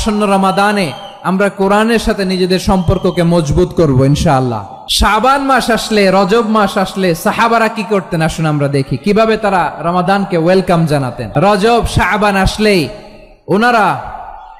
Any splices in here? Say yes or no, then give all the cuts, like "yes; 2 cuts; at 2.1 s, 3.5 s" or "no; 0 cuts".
no; 0 cuts